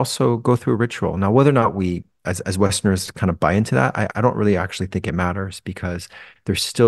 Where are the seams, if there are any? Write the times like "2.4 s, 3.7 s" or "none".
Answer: none